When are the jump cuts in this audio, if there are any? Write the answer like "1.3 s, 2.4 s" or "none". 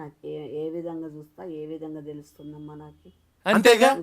3.1 s